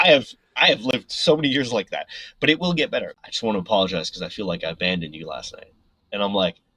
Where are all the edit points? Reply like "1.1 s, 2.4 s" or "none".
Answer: 3.2 s